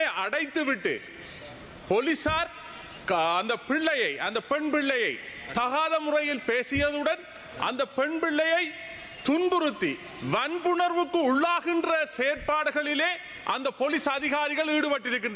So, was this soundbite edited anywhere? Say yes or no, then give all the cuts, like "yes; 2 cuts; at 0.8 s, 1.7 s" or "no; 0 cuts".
no; 0 cuts